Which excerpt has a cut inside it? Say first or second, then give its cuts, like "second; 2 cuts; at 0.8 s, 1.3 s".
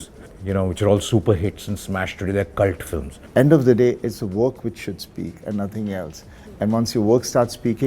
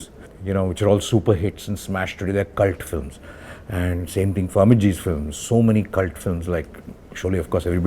first; 1 cut; at 3.2 s